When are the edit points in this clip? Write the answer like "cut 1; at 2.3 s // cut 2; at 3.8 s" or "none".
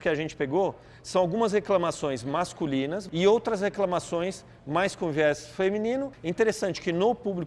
cut 1; at 3.0 s // cut 2; at 6.2 s